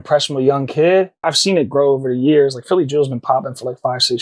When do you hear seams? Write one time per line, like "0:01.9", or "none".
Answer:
0:01.3